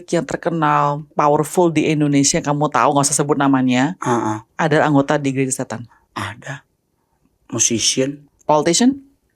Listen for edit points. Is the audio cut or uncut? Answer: cut